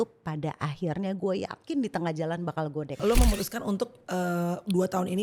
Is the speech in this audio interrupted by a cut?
yes; 1 cut; at 3.0 s

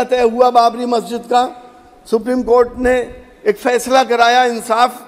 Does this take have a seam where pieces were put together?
no; 0 cuts

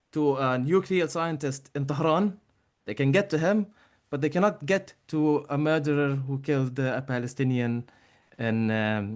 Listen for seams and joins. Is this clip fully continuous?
yes; 0 cuts

